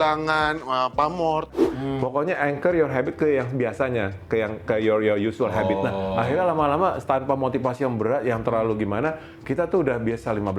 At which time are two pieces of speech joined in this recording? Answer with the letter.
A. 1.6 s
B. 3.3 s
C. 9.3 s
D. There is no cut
A